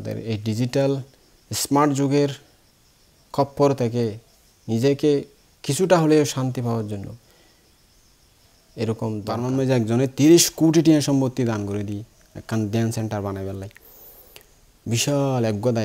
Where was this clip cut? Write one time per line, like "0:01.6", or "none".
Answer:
0:09.4